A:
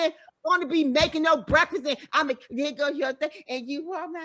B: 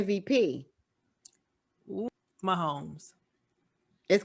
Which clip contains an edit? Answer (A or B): B